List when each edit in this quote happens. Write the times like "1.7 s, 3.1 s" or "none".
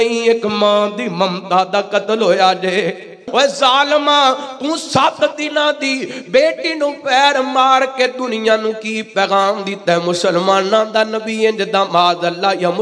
3.2 s